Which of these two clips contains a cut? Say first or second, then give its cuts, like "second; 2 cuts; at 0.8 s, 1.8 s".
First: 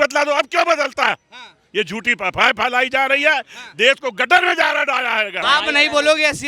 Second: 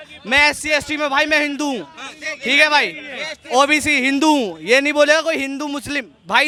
first; 1 cut; at 5.3 s